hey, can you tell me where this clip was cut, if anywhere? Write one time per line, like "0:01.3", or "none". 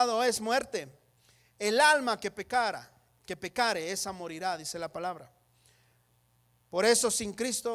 none